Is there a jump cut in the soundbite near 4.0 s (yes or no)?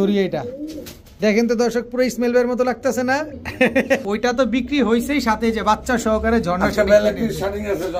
yes